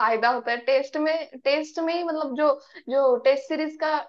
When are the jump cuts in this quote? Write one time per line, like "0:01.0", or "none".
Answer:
none